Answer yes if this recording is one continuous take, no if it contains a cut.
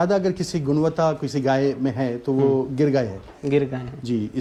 yes